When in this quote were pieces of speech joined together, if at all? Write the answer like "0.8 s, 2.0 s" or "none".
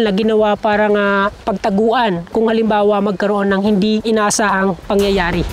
none